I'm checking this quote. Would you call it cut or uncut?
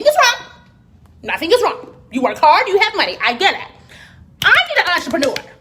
uncut